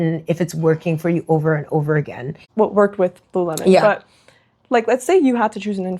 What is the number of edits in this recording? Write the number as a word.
one